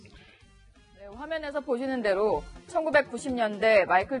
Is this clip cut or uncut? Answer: cut